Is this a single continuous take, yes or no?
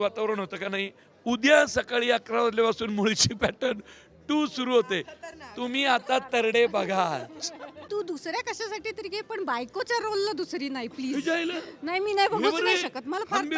no